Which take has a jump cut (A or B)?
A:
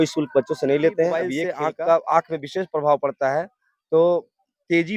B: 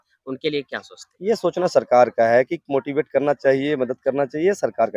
A